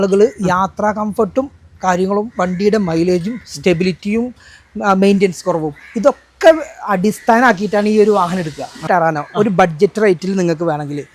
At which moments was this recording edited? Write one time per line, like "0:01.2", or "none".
0:08.8